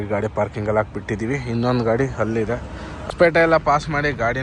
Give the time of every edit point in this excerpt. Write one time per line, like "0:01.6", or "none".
0:03.1